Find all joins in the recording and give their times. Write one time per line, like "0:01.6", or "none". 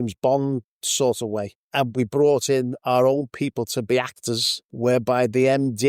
0:01.9
0:04.7